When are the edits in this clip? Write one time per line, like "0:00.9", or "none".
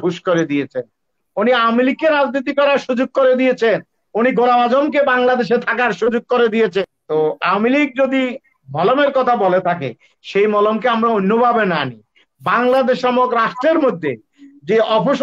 0:06.9

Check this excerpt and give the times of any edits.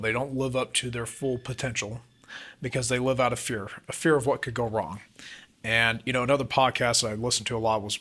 none

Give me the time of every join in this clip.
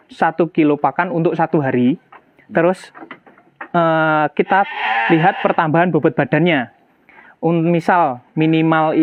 none

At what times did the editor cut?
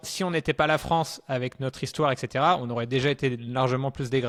none

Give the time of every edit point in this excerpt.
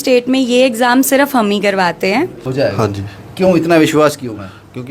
0:02.4

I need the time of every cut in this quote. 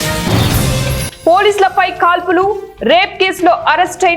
0:01.1

